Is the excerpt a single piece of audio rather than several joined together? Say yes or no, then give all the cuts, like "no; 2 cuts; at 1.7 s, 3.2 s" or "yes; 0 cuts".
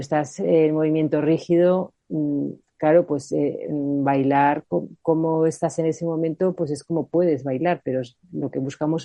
yes; 0 cuts